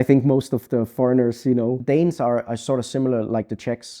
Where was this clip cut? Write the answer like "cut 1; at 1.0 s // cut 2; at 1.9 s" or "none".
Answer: cut 1; at 1.8 s